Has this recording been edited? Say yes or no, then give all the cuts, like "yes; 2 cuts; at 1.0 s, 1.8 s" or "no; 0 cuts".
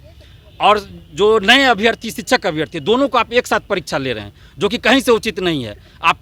no; 0 cuts